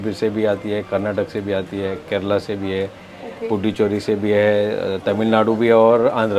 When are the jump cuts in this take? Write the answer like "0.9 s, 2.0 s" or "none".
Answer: none